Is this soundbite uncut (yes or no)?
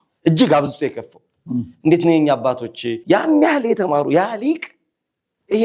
no